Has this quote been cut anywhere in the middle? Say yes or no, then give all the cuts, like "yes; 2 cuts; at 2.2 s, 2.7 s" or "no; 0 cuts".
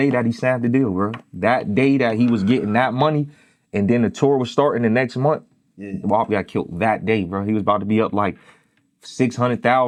no; 0 cuts